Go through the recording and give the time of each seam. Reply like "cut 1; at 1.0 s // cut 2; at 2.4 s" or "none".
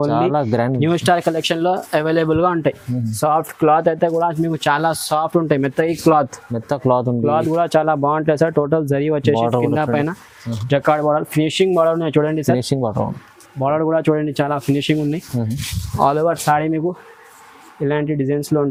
none